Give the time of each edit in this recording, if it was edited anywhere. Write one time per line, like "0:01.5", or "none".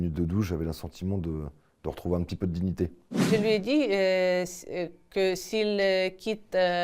0:03.2